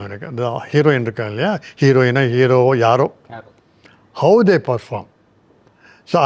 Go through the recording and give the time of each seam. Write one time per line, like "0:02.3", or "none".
none